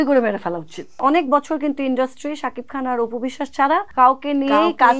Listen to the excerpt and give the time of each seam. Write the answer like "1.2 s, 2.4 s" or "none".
1.0 s, 3.9 s